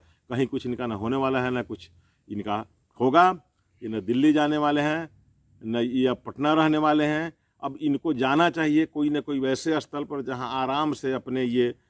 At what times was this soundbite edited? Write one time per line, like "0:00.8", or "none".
none

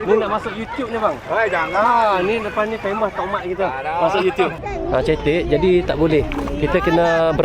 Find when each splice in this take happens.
0:04.6

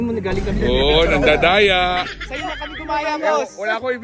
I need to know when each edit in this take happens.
0:02.2

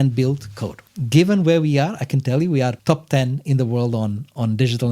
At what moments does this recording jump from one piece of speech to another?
0:00.8
0:02.8

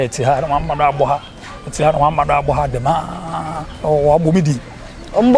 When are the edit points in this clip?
0:03.6

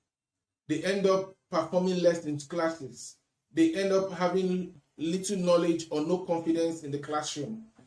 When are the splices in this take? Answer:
0:04.8

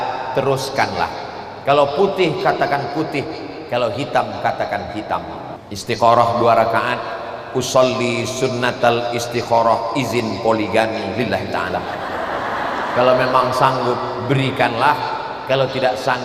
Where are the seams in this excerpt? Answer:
0:05.6

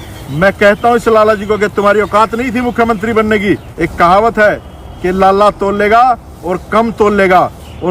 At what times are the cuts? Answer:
0:03.7

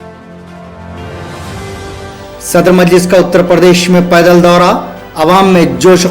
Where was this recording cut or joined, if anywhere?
0:02.0

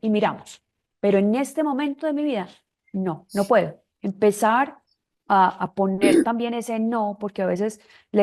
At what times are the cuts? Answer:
0:03.9

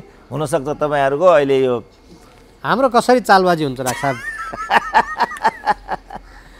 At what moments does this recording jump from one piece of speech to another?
none

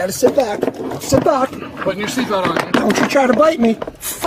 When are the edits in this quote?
none

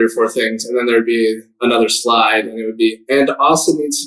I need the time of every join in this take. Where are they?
none

